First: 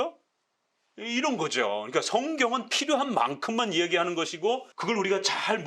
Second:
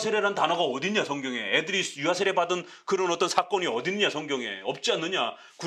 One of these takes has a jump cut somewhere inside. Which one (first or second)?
first